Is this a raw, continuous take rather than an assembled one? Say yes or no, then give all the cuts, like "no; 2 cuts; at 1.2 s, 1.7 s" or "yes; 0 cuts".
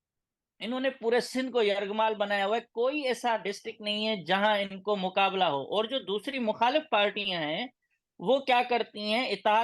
yes; 0 cuts